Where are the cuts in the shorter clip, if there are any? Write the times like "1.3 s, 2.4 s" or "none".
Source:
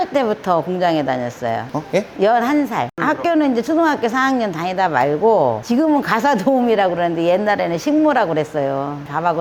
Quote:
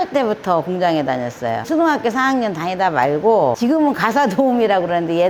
1.7 s, 3.6 s